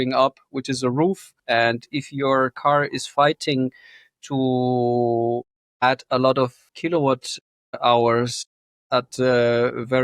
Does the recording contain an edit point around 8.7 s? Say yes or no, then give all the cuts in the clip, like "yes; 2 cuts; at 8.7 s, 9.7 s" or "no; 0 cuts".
no; 2 cuts; at 1.3 s, 6.7 s